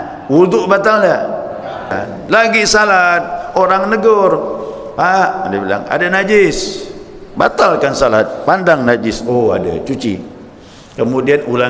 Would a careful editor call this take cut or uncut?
cut